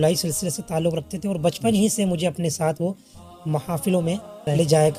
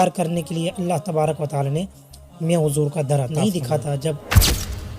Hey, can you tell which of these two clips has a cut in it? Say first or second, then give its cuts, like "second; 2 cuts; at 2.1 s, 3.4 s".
second; 1 cut; at 3.3 s